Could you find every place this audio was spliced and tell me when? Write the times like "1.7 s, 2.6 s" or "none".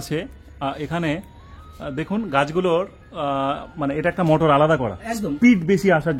none